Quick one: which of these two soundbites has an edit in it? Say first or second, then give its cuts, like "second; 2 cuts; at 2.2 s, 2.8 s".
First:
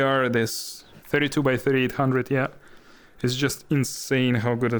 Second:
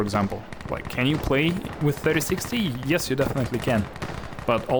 first; 1 cut; at 1.0 s